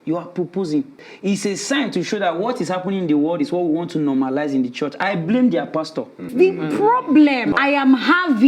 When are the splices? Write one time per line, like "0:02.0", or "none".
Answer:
0:01.0
0:06.3
0:07.5